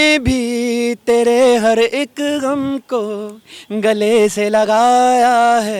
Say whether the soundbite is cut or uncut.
uncut